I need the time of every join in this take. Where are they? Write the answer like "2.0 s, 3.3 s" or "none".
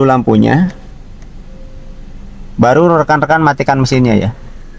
none